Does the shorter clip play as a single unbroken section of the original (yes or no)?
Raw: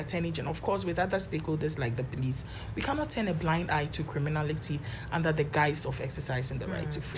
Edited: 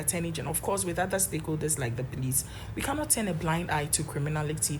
yes